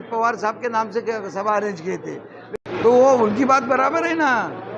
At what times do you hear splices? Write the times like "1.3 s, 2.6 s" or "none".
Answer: 2.6 s